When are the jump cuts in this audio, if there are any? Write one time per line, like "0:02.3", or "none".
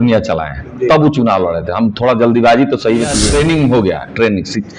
0:03.2